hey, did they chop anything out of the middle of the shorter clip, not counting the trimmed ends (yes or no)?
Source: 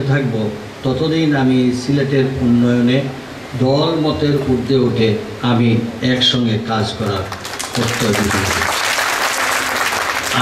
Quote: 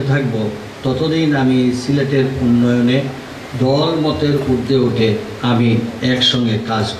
no